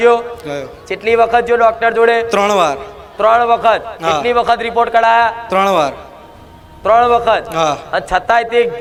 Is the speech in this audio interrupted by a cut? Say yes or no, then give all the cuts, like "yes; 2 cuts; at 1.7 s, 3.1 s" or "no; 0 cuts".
no; 0 cuts